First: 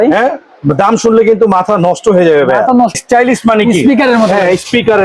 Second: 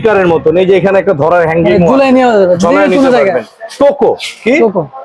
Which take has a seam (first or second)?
first